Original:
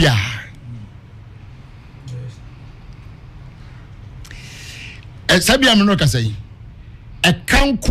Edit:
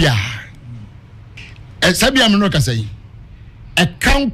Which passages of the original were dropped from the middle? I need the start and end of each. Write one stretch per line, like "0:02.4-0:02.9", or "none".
0:01.4-0:04.8